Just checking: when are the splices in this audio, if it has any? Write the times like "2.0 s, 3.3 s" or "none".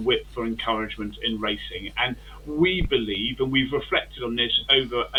none